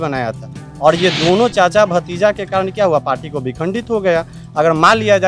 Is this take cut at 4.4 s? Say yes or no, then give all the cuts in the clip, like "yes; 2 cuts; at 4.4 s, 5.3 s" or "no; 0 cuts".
no; 0 cuts